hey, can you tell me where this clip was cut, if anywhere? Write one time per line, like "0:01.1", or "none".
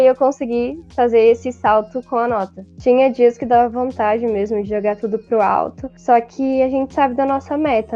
0:02.6

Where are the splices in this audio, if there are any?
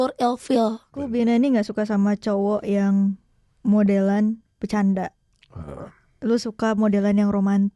0:01.0

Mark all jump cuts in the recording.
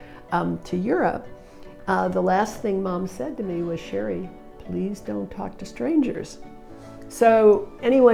none

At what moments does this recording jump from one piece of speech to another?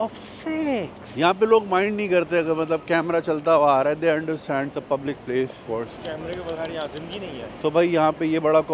0:01.0
0:07.6

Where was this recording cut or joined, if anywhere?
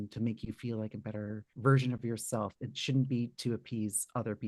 0:01.5

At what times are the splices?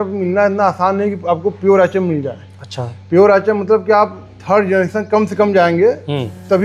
none

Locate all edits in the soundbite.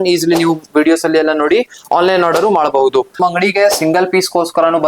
0:03.1

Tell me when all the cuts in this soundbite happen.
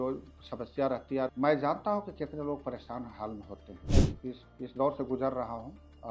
0:01.3
0:03.9

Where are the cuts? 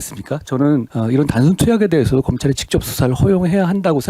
0:00.9

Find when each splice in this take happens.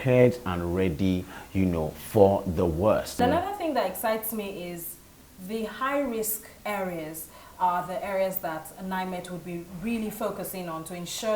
0:03.2

